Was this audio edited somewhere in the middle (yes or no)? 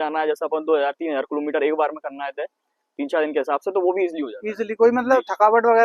no